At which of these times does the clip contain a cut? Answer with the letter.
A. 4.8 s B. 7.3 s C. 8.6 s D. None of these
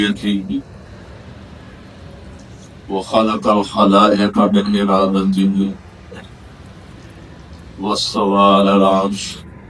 D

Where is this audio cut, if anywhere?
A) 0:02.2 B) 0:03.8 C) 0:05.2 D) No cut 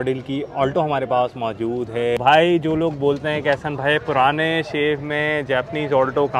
A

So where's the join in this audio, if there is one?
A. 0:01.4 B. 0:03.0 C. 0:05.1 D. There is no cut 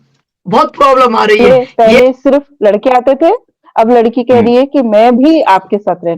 A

